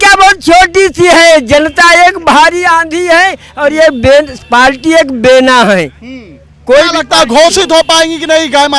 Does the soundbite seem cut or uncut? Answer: uncut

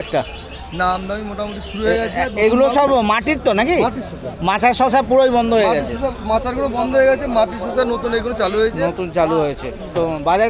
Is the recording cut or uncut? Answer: uncut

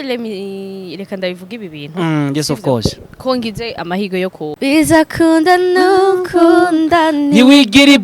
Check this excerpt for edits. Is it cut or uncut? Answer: cut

